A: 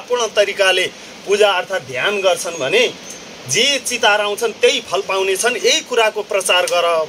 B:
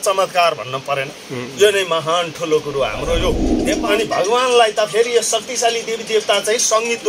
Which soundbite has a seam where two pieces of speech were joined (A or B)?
B